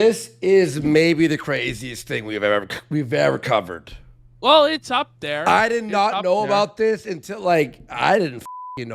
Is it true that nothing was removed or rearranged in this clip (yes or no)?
yes